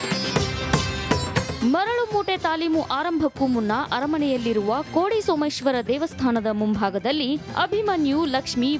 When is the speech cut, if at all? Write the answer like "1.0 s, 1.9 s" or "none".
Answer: none